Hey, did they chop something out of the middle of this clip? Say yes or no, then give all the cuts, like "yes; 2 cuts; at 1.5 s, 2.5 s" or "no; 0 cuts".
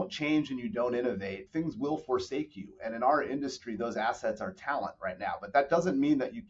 yes; 1 cut; at 1.4 s